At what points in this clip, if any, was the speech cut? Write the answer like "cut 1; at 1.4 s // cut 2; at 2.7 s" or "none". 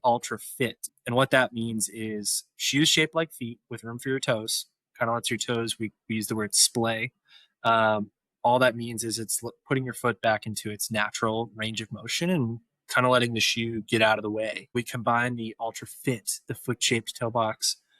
cut 1; at 0.9 s // cut 2; at 14.8 s